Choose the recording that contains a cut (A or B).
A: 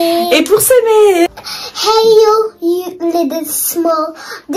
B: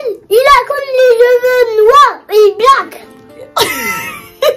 A